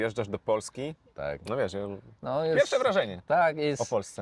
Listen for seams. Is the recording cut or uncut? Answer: uncut